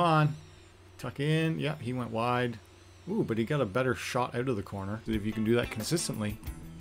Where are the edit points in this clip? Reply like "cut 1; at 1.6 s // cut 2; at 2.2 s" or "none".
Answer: cut 1; at 5.0 s